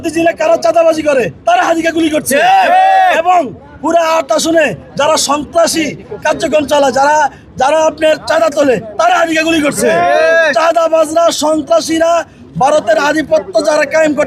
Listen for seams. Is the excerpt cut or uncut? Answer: uncut